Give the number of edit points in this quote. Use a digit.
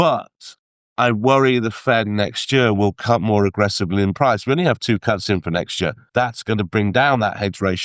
1